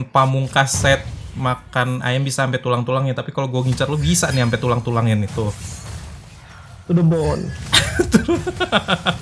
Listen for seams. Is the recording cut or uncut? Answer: uncut